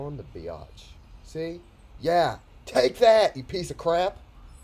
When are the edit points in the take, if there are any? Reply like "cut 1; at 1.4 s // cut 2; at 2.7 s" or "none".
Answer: none